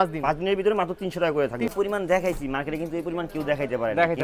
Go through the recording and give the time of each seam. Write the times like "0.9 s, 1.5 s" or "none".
1.7 s